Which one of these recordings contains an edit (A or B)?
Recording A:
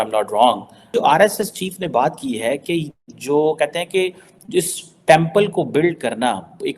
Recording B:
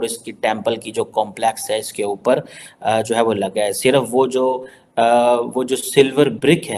A